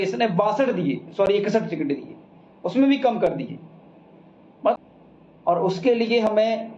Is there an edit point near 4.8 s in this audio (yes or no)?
yes